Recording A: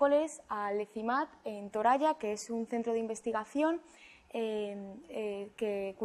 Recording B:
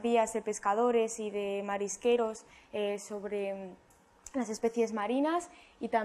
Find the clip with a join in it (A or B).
B